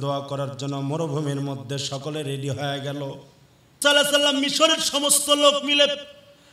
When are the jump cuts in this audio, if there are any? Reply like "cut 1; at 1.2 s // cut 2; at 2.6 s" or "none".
cut 1; at 3.8 s

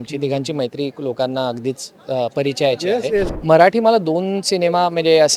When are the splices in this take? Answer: cut 1; at 3.3 s

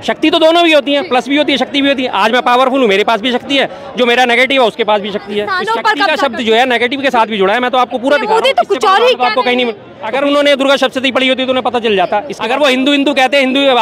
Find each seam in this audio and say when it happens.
cut 1; at 5.6 s // cut 2; at 12.3 s

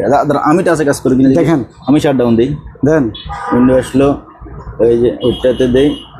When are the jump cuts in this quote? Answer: none

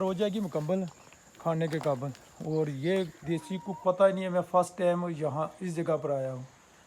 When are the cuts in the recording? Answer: cut 1; at 3.8 s

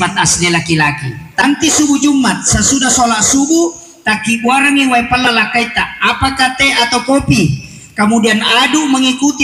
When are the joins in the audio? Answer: cut 1; at 1.4 s

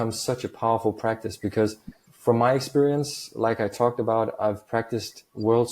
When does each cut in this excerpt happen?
cut 1; at 2.1 s

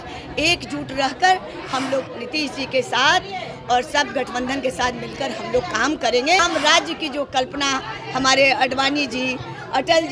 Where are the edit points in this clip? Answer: cut 1; at 6.4 s

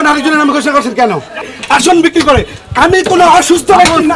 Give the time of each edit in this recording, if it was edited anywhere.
cut 1; at 1.5 s

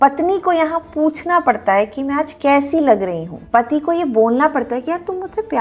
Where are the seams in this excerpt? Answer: none

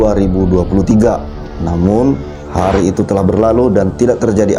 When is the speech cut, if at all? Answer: none

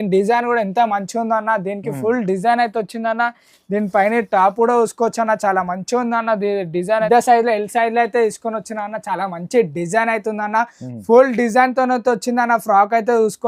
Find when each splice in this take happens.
cut 1; at 7.1 s

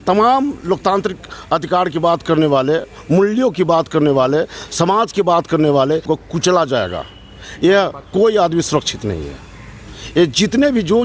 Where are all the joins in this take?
cut 1; at 6.1 s

